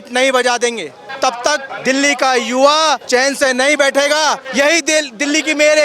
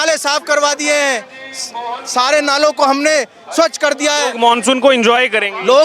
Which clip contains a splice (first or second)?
first